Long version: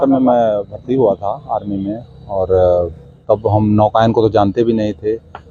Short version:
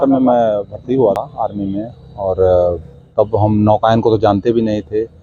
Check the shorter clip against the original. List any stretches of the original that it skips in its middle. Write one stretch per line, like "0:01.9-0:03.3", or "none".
0:01.2-0:01.3